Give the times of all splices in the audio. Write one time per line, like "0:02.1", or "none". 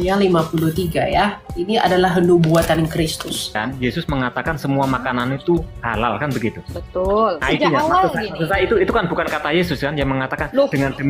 0:01.5
0:03.6
0:07.4